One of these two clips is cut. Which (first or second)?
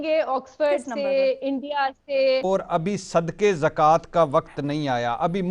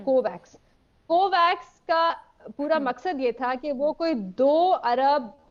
first